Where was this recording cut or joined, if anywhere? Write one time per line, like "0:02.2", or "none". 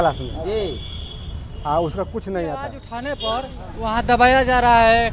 0:02.9